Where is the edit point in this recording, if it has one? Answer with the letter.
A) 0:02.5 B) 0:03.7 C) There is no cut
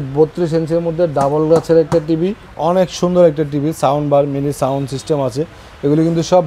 A